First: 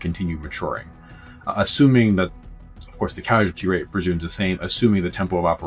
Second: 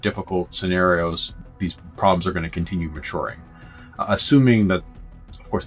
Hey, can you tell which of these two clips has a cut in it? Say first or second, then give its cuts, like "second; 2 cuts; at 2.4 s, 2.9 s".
second; 1 cut; at 1.4 s